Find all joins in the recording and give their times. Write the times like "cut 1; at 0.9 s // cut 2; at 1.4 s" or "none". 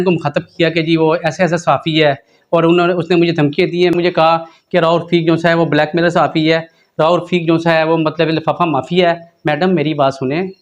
cut 1; at 3.9 s